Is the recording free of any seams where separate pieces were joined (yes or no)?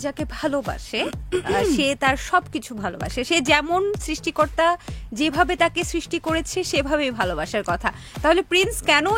yes